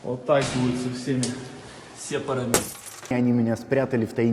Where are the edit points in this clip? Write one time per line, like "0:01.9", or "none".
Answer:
0:03.1